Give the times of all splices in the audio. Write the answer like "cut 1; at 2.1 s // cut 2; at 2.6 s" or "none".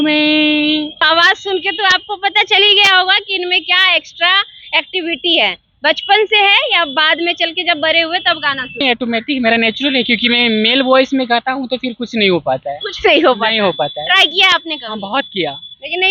cut 1; at 1.1 s // cut 2; at 8.8 s